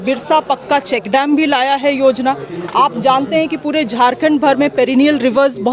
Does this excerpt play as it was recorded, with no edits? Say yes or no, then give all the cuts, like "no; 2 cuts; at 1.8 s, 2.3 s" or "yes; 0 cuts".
yes; 0 cuts